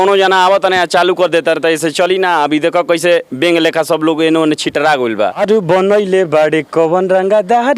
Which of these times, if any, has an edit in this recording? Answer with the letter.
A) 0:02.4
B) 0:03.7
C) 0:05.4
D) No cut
C